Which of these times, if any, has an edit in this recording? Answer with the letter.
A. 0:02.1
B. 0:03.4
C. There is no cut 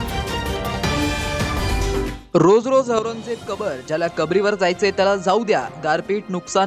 C